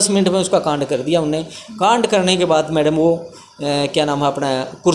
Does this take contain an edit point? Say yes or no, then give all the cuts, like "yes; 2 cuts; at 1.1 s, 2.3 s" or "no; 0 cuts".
no; 0 cuts